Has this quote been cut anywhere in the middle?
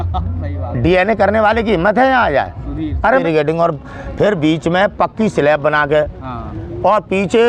yes; 1 cut; at 3.2 s

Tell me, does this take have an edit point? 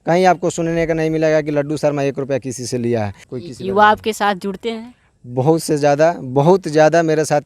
yes; 1 cut; at 3.3 s

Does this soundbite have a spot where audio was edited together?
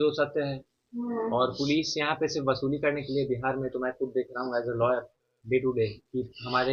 no; 0 cuts

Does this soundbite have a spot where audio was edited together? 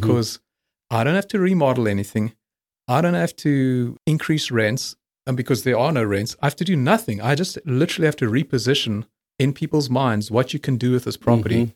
no; 0 cuts

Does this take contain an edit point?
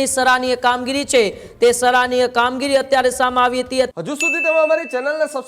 yes; 1 cut; at 3.9 s

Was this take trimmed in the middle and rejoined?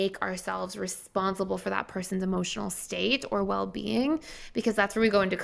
no; 0 cuts

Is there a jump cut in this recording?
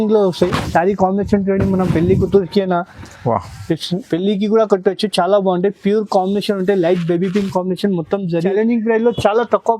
yes; 1 cut; at 8.5 s

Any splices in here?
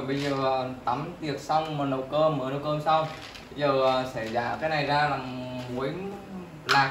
no; 0 cuts

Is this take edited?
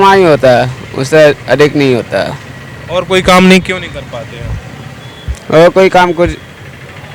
no; 0 cuts

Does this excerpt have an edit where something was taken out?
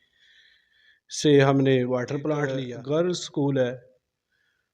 yes; 1 cut; at 2.7 s

